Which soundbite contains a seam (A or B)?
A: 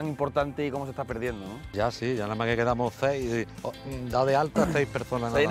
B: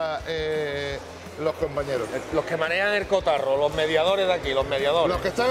A